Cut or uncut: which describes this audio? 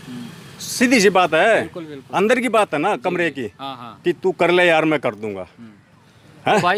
uncut